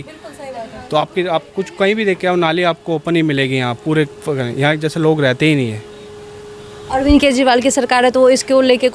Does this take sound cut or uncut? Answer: uncut